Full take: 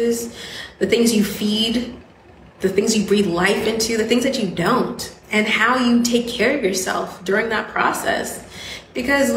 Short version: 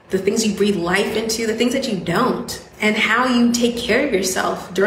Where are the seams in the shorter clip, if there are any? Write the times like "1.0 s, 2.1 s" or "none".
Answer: none